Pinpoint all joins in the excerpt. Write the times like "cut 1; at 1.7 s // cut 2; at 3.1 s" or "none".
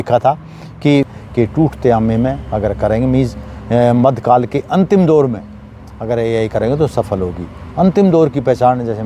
cut 1; at 1.2 s